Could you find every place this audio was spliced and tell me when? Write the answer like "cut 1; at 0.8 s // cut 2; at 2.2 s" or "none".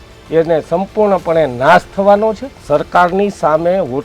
cut 1; at 2.5 s